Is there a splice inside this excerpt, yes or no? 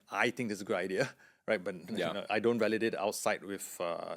no